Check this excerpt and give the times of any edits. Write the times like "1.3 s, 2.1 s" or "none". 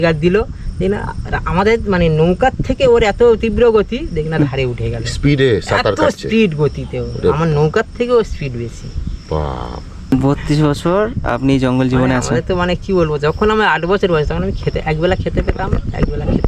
10.0 s